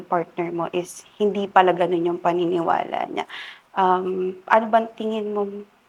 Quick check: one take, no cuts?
yes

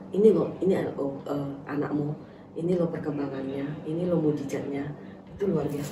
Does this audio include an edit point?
no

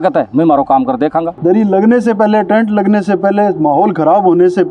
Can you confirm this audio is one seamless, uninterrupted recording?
no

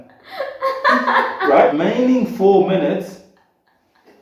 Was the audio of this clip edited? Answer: yes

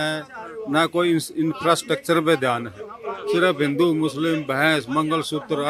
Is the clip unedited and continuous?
yes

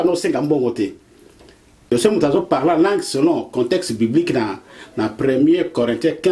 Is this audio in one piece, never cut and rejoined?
no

